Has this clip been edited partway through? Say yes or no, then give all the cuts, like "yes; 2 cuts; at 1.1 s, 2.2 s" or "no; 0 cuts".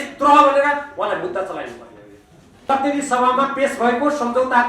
yes; 1 cut; at 2.7 s